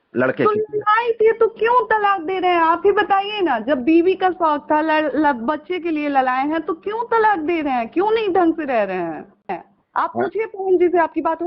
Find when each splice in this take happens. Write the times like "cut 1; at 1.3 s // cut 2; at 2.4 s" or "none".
cut 1; at 9.7 s